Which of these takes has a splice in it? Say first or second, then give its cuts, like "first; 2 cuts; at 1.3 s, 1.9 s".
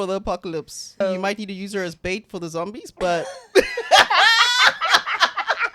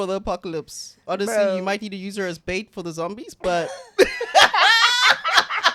first; 1 cut; at 1.0 s